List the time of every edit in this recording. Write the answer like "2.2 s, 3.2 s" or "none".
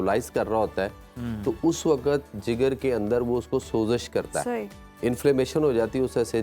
none